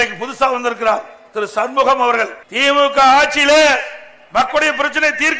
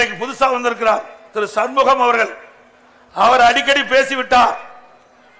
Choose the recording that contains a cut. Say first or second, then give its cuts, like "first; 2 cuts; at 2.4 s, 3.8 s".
first; 1 cut; at 2.4 s